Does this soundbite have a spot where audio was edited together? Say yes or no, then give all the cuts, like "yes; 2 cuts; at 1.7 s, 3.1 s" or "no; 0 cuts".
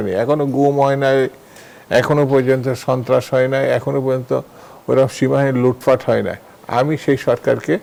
no; 0 cuts